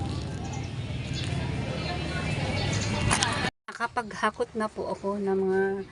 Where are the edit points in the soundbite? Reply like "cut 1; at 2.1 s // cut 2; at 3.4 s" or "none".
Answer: cut 1; at 3.6 s